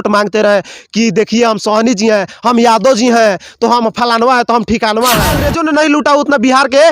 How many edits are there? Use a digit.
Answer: 1